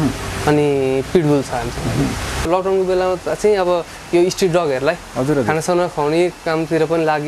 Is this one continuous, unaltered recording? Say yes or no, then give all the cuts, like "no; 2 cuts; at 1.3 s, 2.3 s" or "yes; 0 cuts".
no; 1 cut; at 2.5 s